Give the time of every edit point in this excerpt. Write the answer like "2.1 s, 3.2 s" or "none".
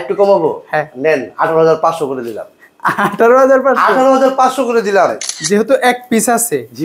5.3 s